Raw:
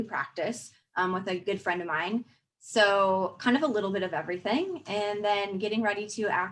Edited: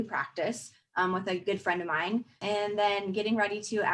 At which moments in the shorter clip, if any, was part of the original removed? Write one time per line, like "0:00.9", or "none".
0:02.3